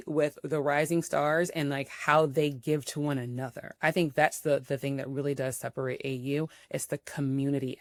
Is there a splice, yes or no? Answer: no